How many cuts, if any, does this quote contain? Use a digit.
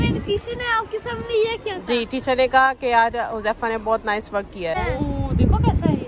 1